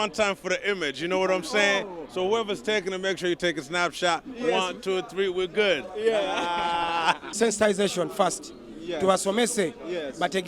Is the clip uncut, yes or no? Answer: no